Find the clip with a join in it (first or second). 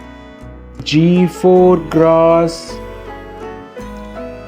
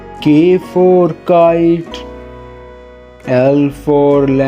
second